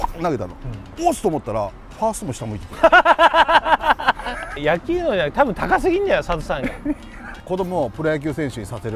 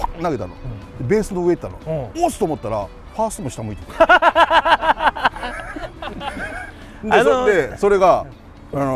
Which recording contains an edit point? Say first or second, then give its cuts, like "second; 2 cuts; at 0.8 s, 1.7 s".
first; 3 cuts; at 0.9 s, 4.6 s, 7.3 s